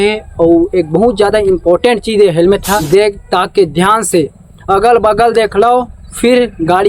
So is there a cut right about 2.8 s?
yes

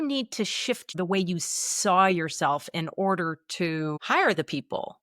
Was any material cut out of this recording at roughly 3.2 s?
no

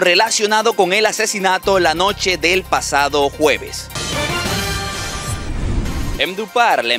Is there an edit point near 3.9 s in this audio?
yes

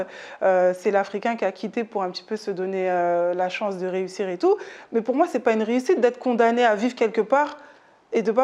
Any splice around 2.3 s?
no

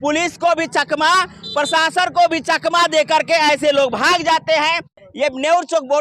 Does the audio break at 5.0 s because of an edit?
yes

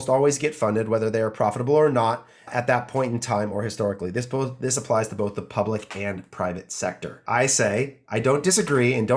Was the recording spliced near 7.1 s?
yes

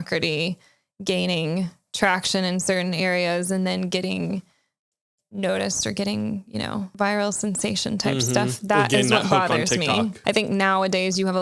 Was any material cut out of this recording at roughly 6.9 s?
yes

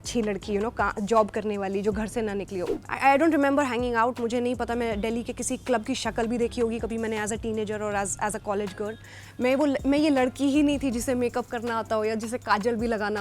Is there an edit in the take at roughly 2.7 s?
yes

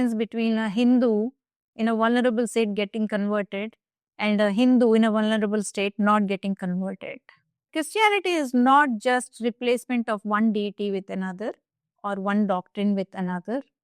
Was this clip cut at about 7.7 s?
yes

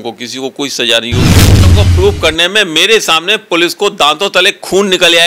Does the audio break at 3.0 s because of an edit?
no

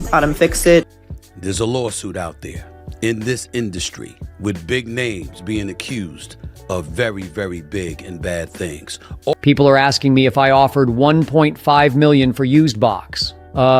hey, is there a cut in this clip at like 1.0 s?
yes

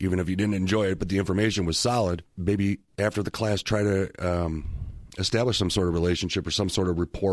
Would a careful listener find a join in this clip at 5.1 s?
no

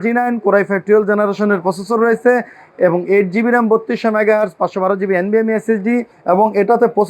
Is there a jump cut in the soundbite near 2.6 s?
no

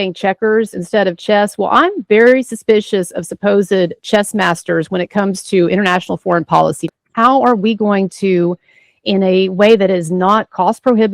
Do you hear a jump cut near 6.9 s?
yes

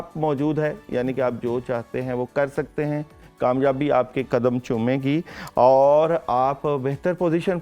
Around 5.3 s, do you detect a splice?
no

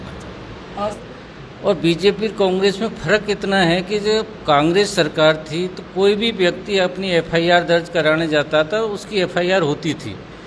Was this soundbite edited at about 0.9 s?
yes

